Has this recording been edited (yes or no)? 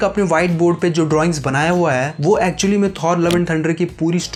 no